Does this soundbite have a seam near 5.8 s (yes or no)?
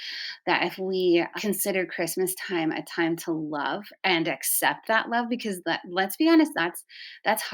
no